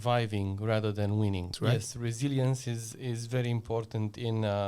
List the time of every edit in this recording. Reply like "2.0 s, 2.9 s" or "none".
1.5 s

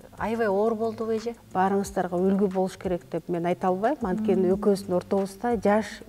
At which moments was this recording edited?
1.4 s

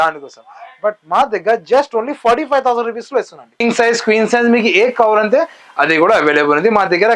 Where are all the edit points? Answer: 3.6 s

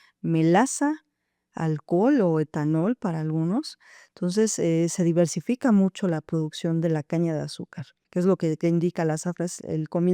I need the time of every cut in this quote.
8.0 s

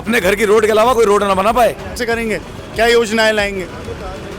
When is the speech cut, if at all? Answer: 2.0 s

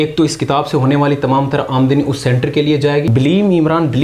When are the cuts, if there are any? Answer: 3.1 s

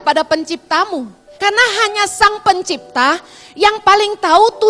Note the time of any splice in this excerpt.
1.2 s

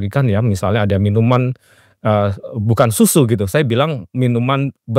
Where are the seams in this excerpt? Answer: none

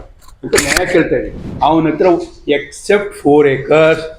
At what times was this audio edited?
1.4 s

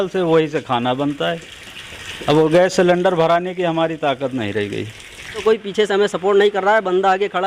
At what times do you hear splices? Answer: 5.4 s

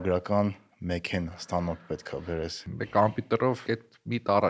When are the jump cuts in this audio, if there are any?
2.6 s, 3.6 s

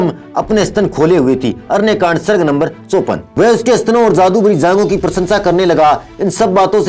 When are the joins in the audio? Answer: 3.2 s

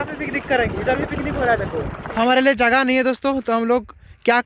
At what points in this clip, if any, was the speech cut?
2.1 s

